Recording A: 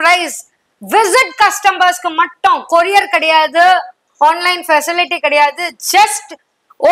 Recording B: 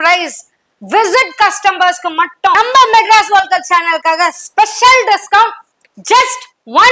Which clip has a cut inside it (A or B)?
B